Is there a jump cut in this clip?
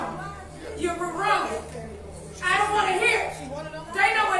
no; 0 cuts

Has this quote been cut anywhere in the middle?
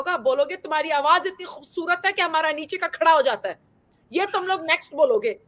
no; 0 cuts

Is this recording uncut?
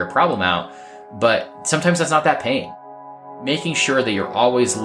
no; 2 cuts; at 1.6 s, 3.2 s

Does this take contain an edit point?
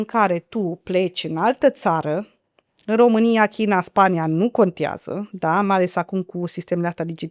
no; 0 cuts

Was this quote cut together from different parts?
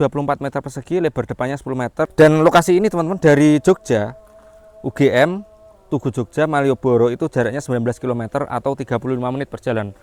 yes; 1 cut; at 2.1 s

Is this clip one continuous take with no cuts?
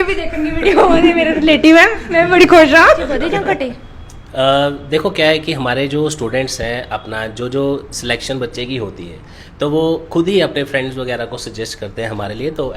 no; 1 cut; at 3.3 s

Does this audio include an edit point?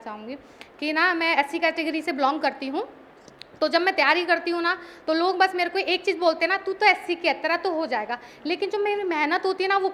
no; 0 cuts

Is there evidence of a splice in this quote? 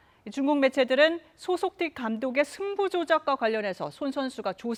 no; 0 cuts

